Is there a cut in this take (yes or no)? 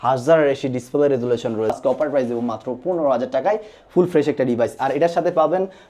yes